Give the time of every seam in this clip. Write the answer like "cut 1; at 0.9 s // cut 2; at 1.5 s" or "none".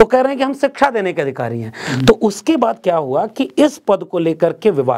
none